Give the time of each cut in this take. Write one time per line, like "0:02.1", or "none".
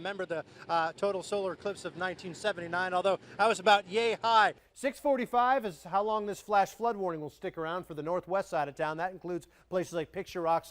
0:04.7